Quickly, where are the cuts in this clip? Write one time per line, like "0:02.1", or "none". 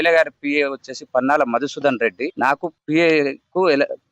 0:02.3